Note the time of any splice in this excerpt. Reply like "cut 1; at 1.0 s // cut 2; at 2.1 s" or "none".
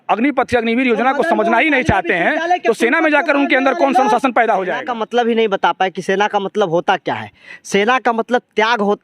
cut 1; at 4.8 s